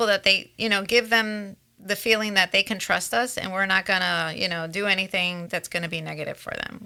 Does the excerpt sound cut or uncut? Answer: uncut